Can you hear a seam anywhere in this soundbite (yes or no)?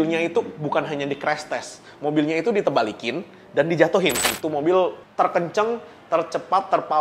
yes